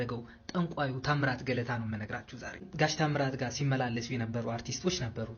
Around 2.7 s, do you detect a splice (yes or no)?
yes